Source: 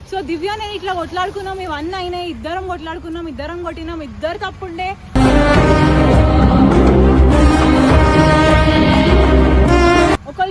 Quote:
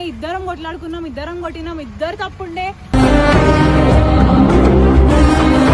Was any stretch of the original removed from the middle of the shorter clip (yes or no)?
no